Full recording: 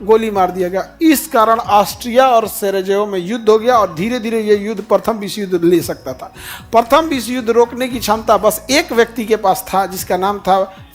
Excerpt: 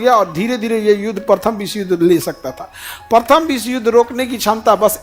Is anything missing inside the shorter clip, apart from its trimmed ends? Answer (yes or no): no